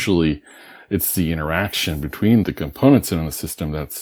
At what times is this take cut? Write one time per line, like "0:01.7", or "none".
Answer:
0:02.5